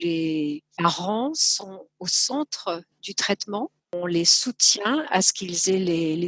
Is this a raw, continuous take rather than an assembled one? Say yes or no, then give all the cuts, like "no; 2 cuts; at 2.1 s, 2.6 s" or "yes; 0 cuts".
no; 1 cut; at 1.7 s